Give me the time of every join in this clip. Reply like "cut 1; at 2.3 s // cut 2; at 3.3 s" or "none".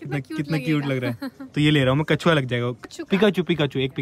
cut 1; at 2.9 s